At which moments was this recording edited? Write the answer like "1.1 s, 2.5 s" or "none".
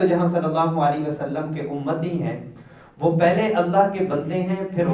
none